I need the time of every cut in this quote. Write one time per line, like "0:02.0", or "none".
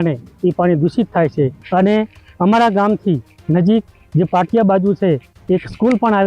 0:01.6